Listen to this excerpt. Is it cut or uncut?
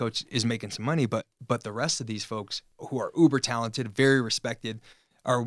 cut